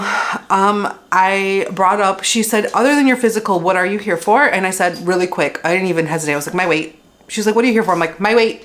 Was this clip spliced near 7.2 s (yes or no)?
no